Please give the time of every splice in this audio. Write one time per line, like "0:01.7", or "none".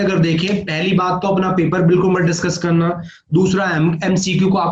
none